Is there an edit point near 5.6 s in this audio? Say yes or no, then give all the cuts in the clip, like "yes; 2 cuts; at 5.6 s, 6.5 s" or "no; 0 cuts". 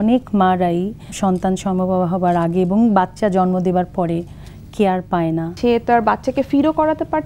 yes; 2 cuts; at 1.1 s, 5.6 s